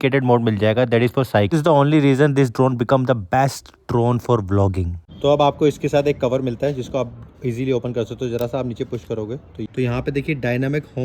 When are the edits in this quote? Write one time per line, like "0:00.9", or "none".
0:01.5
0:09.6